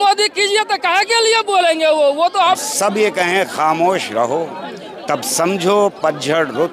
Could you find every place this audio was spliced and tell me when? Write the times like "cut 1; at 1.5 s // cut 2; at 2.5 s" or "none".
cut 1; at 2.6 s